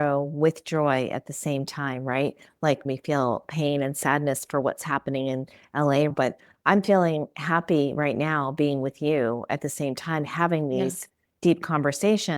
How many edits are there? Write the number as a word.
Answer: one